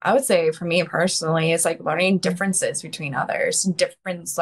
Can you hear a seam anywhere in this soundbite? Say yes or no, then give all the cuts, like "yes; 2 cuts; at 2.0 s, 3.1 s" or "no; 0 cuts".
no; 0 cuts